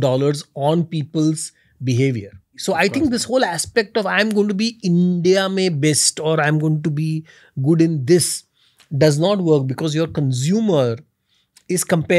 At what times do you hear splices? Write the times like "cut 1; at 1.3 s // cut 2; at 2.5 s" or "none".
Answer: cut 1; at 2.5 s